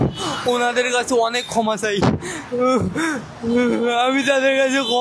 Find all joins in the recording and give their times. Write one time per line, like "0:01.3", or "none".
none